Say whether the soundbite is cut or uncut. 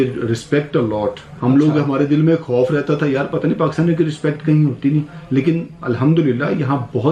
uncut